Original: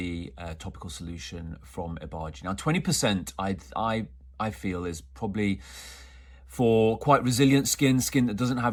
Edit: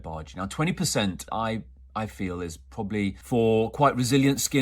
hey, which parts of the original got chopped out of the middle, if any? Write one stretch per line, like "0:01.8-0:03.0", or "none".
0:03.3-0:03.7
0:05.6-0:06.5